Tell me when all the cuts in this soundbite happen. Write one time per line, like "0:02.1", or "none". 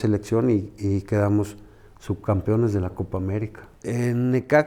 0:03.7